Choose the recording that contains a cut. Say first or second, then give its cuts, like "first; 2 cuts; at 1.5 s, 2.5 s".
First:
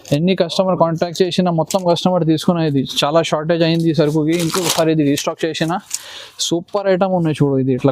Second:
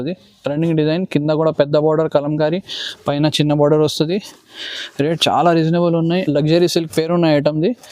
second; 1 cut; at 6.2 s